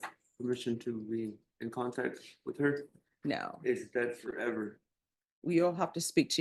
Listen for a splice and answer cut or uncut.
uncut